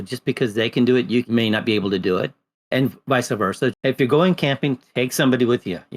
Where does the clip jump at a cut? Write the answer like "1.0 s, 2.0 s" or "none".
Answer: 1.3 s, 2.5 s, 3.8 s